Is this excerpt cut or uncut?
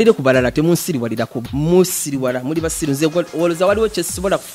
cut